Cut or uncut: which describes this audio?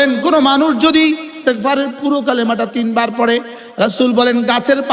cut